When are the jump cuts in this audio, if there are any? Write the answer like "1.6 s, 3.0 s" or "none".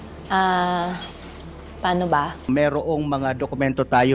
2.3 s